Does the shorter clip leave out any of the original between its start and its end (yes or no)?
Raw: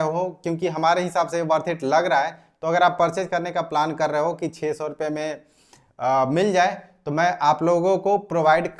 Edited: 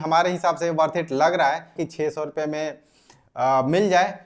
yes